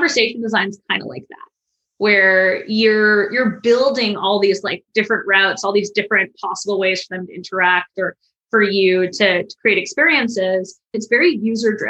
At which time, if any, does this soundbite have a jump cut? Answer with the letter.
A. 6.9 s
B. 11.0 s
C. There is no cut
B